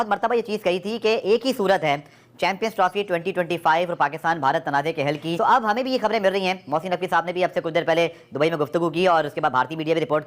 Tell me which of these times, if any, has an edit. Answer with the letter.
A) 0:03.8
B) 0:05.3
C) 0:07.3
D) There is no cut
B